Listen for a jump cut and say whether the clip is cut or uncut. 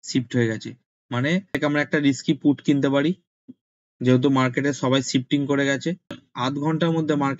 cut